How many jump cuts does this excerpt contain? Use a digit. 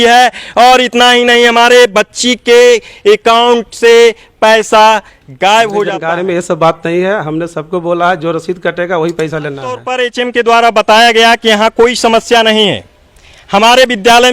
2